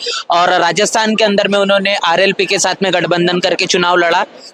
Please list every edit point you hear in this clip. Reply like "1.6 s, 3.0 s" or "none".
none

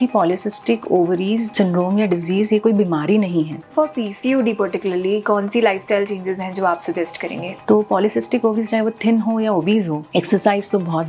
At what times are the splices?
1.5 s, 3.7 s, 7.5 s, 10.0 s

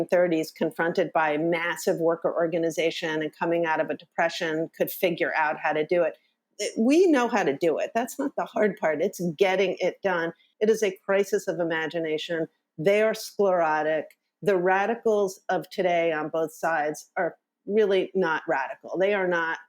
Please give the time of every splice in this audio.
10.4 s

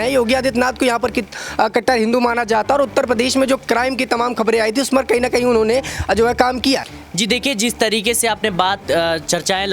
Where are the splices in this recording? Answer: 6.9 s

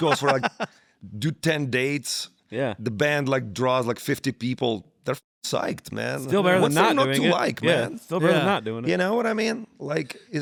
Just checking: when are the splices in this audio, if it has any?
none

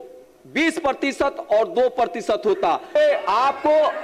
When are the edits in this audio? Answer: 3.0 s

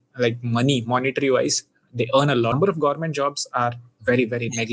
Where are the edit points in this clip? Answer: 2.5 s

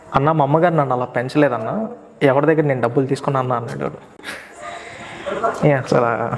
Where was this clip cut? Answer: none

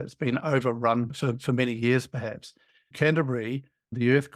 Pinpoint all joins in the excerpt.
2.9 s

